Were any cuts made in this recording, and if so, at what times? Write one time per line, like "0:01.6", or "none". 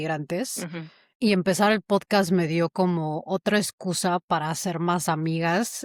none